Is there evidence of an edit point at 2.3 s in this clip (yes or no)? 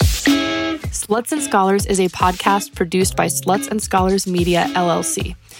no